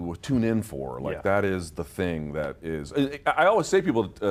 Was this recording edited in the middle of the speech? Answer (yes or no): no